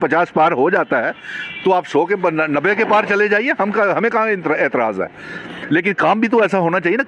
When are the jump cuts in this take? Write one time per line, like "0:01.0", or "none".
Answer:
none